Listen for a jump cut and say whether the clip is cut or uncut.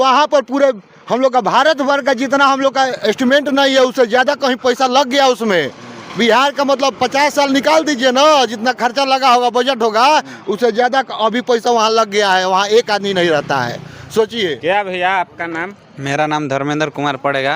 uncut